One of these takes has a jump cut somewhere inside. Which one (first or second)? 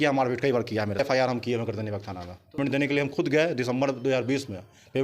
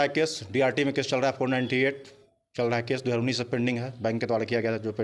first